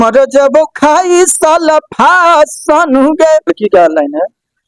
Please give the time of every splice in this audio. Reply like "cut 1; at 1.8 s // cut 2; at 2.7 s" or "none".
cut 1; at 3.5 s